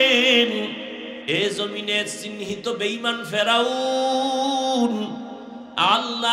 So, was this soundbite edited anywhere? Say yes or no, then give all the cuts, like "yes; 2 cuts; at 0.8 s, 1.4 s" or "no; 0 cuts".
yes; 1 cut; at 1.2 s